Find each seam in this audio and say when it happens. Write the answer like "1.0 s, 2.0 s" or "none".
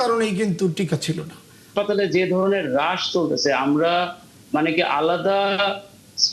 1.7 s

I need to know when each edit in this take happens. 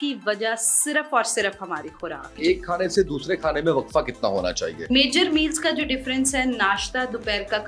2.4 s, 4.8 s

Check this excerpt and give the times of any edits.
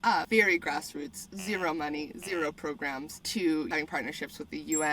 3.2 s, 3.7 s

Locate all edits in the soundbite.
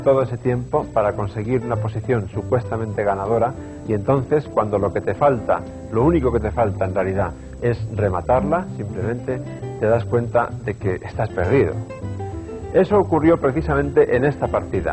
11.3 s

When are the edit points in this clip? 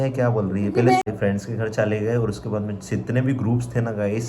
1.0 s

